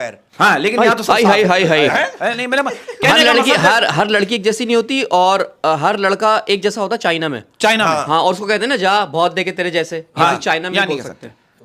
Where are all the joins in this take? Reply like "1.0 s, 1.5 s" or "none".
none